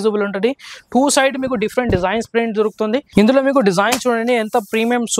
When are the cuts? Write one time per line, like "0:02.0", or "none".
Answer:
0:03.1